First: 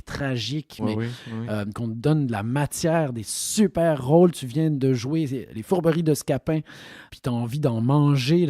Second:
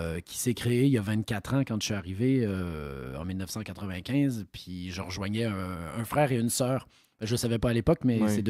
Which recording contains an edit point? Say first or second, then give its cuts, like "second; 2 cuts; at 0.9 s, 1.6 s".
first; 3 cuts; at 0.8 s, 1.7 s, 7.0 s